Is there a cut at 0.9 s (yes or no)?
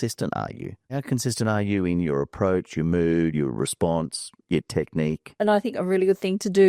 yes